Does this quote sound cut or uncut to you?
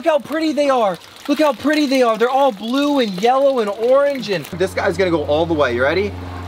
cut